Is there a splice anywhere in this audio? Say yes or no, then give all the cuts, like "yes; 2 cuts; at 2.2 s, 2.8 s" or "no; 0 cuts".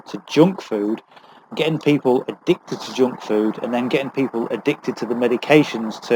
no; 0 cuts